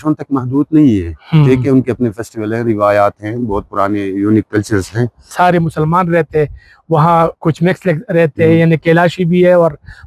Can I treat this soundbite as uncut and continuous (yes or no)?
no